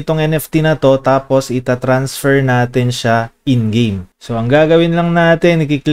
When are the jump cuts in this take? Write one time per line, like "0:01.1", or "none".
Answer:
none